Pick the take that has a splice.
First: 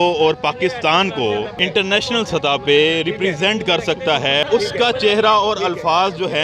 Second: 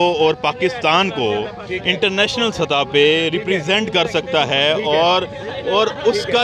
first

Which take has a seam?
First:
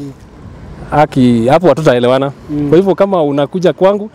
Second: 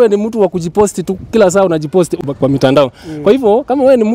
second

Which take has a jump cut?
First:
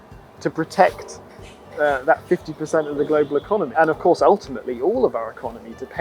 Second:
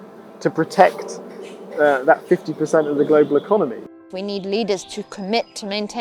second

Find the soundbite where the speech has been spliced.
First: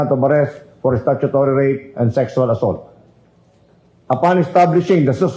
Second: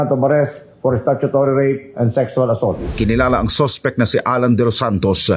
second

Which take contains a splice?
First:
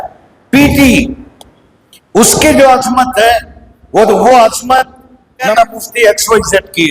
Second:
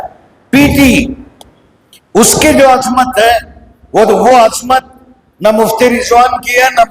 first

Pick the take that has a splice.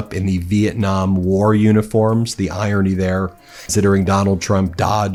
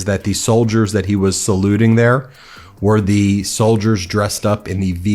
second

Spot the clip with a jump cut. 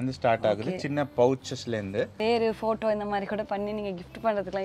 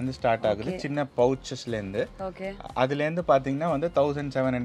first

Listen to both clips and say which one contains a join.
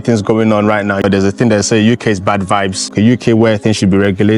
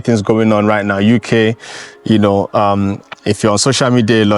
first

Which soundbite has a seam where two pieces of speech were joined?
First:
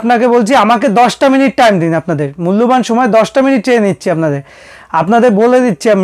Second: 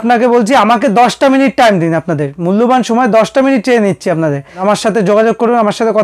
second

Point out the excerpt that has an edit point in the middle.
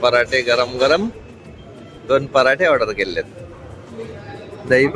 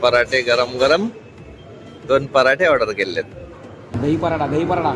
second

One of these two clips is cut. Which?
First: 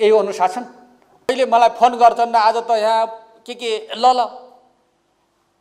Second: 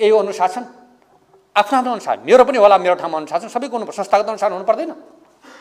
first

